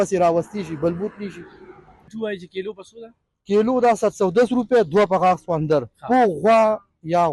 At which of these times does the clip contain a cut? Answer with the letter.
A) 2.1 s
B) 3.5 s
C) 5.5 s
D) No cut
A